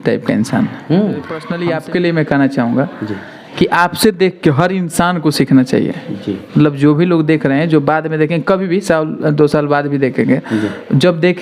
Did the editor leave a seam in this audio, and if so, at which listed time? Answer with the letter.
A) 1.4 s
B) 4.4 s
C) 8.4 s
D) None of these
A